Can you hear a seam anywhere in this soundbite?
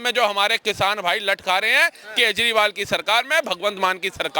no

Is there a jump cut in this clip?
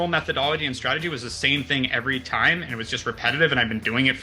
no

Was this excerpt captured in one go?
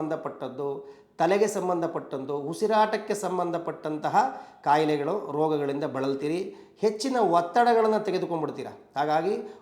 yes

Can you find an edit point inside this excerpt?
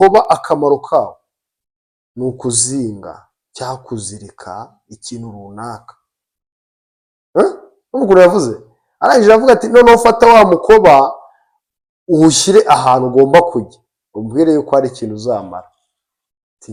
no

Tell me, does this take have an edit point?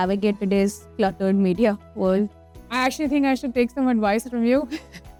no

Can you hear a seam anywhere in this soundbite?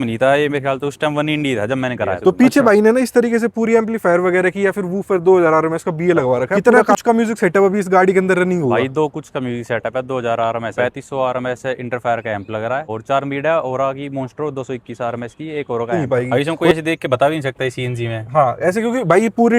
yes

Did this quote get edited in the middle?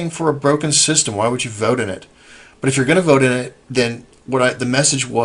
no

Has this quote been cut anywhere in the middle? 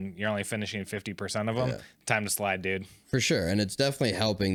no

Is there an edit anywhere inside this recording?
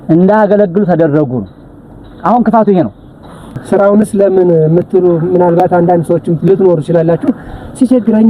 yes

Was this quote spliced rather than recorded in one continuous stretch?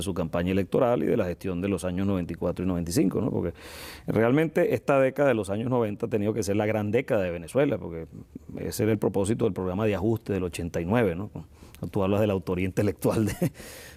no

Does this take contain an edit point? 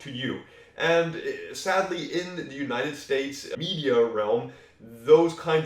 yes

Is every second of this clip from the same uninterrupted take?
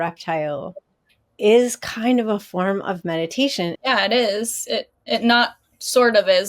no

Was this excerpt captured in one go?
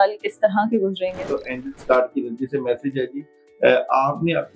no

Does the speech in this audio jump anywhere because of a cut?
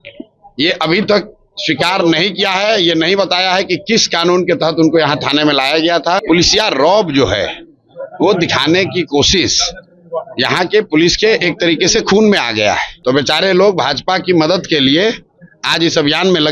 yes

